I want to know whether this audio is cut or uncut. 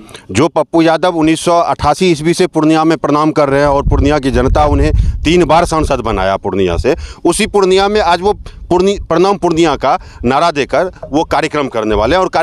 uncut